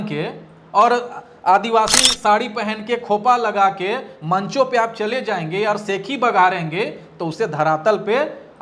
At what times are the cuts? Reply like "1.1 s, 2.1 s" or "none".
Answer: none